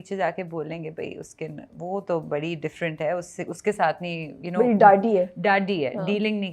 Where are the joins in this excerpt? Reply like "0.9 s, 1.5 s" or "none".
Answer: none